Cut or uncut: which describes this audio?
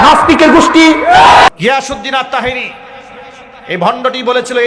cut